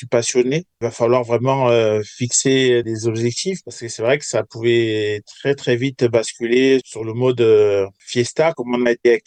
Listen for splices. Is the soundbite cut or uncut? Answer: uncut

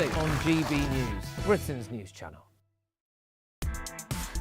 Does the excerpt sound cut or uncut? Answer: cut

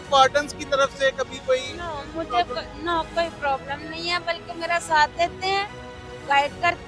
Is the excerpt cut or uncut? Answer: uncut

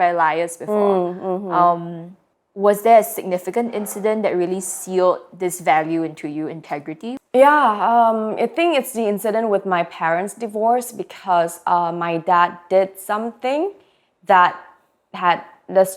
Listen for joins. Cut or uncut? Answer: uncut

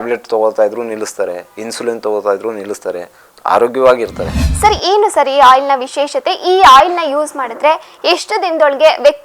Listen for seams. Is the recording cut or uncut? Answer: cut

